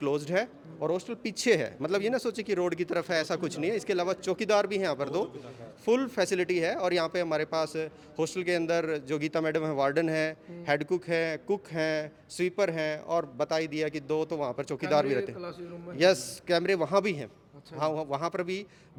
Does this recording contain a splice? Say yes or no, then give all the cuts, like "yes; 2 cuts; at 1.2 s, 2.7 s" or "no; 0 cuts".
no; 0 cuts